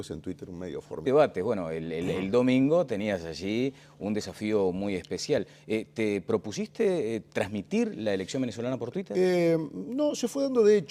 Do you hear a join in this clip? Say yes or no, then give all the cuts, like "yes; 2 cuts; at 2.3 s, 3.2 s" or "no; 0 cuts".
no; 0 cuts